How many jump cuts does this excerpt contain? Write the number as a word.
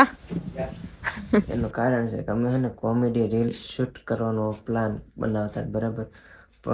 one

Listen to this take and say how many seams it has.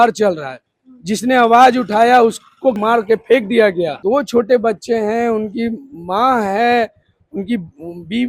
one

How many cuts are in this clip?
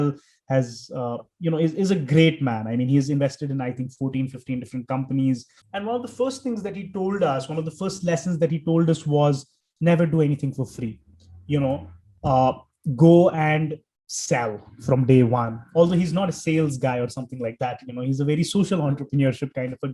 zero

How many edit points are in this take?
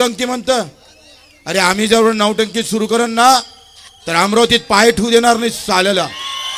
zero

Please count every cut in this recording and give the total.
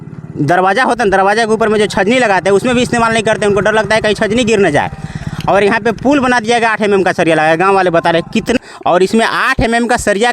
one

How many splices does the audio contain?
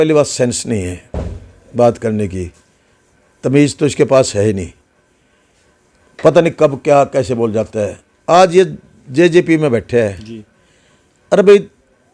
zero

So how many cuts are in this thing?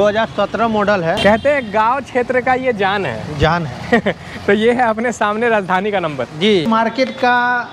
two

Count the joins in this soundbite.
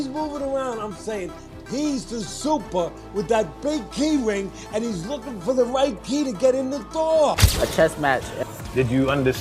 one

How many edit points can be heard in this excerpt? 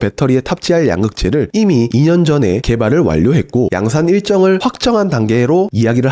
one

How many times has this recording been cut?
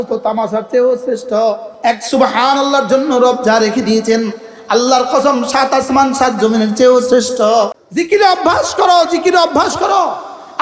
two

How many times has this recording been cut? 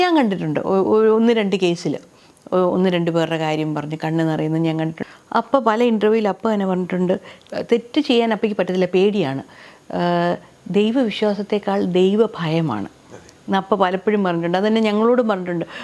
two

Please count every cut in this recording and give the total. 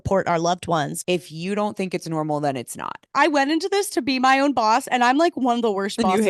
two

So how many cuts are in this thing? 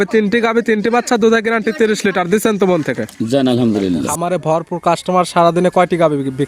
one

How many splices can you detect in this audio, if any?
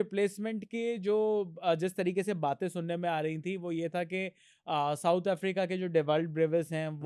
zero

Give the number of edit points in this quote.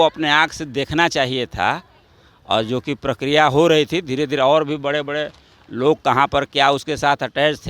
zero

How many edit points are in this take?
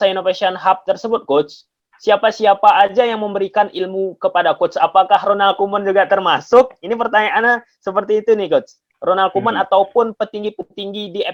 zero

